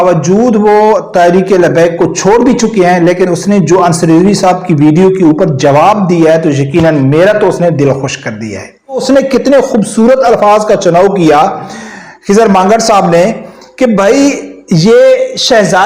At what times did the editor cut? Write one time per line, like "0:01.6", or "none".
0:09.0